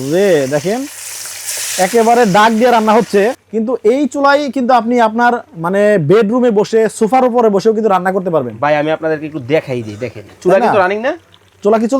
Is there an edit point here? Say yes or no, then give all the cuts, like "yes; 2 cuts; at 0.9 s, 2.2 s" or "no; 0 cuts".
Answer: yes; 1 cut; at 3.3 s